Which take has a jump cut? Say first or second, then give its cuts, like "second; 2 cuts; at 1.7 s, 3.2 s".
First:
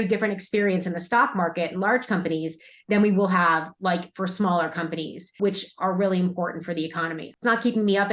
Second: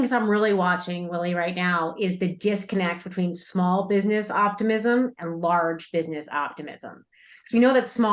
first; 2 cuts; at 5.3 s, 7.3 s